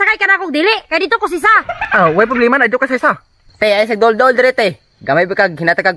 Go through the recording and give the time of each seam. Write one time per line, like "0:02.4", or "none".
none